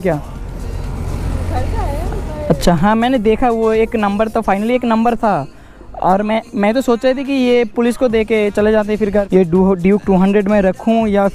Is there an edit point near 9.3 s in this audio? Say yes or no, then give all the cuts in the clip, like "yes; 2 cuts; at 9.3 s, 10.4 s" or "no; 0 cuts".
yes; 1 cut; at 9.3 s